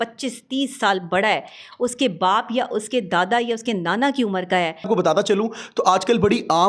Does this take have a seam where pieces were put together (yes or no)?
yes